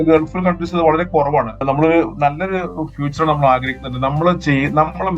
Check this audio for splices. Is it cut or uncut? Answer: cut